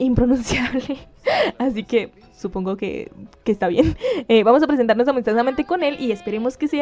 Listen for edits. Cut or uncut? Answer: uncut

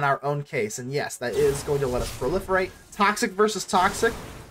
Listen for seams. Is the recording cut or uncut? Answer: cut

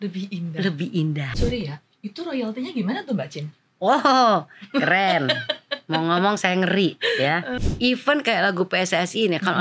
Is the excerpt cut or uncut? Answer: cut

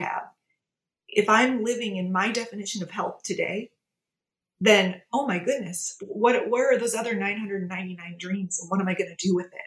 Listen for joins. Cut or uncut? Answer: uncut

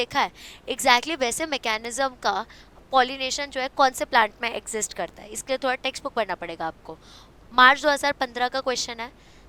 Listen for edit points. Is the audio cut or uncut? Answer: uncut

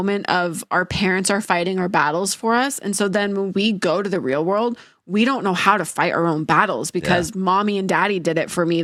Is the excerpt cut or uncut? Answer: uncut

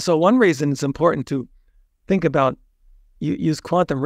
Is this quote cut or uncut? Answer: uncut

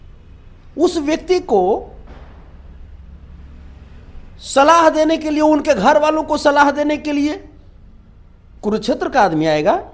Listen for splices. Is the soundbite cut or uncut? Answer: uncut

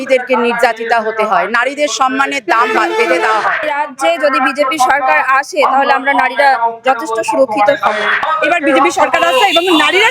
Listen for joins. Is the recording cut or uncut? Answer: cut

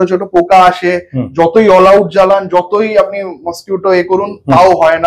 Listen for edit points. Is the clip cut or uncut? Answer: uncut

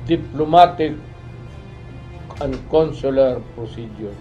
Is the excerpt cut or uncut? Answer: uncut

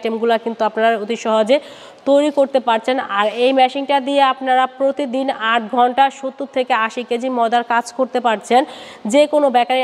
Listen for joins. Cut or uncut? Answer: uncut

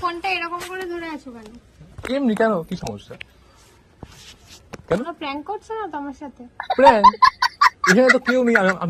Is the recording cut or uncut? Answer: uncut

